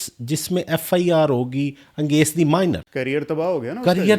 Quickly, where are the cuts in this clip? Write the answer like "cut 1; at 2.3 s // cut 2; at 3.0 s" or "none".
cut 1; at 2.9 s